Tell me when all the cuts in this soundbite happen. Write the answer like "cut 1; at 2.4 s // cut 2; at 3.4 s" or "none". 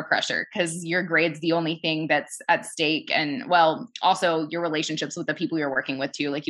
none